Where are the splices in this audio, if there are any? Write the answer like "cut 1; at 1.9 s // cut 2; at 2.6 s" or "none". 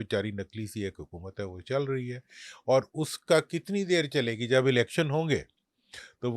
none